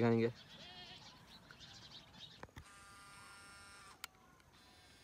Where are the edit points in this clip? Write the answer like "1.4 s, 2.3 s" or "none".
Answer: 2.3 s